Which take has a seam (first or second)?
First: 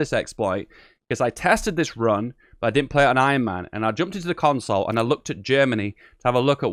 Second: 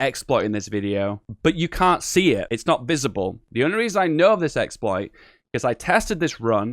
second